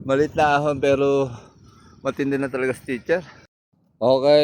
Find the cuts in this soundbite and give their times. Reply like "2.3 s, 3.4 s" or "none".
3.4 s